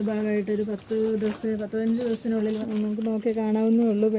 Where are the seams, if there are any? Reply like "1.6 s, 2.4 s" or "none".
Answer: 2.6 s